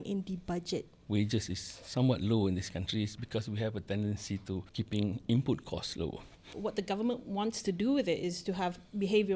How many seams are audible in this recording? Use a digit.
3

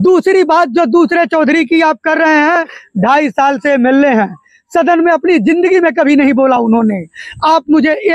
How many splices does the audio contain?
0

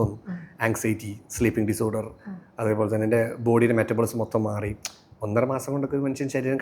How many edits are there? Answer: 0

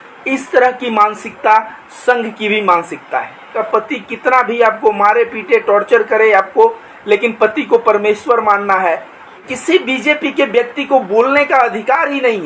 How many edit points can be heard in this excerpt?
2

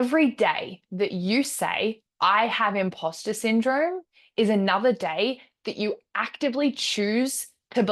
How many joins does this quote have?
0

